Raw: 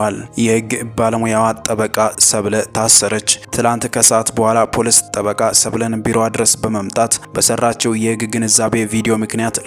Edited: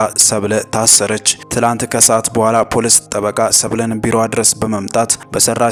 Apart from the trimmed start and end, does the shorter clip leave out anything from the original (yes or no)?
no